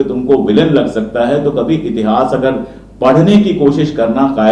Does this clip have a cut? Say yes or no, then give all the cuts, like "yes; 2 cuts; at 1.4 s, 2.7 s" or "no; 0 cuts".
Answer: no; 0 cuts